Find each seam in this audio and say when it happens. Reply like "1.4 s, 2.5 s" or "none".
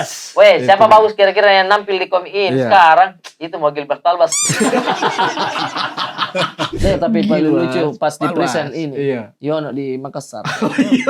6.8 s